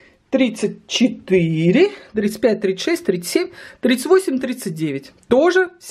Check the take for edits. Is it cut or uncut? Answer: uncut